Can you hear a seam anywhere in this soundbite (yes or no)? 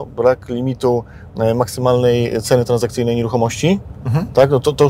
no